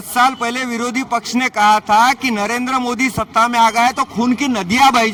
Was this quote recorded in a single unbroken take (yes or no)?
yes